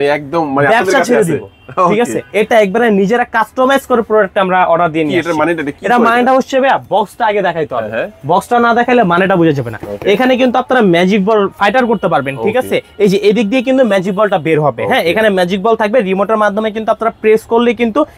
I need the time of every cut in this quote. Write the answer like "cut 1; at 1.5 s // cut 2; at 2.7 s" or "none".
none